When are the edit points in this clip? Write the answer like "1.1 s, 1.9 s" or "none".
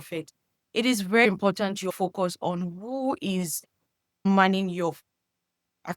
1.9 s, 4.2 s